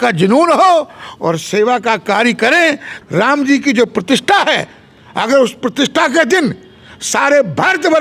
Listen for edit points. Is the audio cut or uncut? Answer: cut